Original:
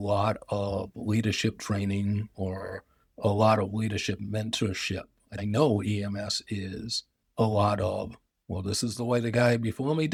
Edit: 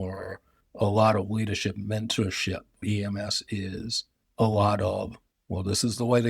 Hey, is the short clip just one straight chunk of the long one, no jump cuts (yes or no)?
no